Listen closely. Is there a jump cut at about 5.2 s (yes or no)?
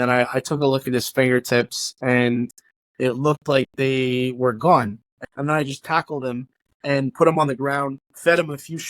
yes